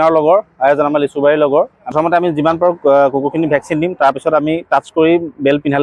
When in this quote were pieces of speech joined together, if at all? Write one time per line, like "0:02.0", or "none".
0:01.9